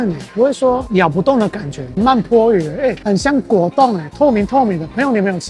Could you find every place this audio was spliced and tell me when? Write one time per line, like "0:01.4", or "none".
0:01.9
0:03.0